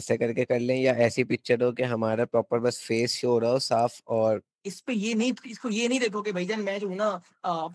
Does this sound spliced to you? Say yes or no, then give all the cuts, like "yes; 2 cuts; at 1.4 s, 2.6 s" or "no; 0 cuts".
yes; 1 cut; at 4.5 s